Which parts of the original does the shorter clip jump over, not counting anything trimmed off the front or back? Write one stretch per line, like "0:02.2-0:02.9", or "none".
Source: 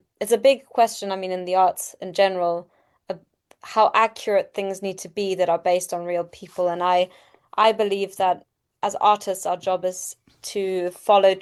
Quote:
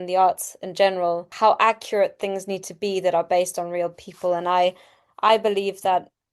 0:02.7-0:03.6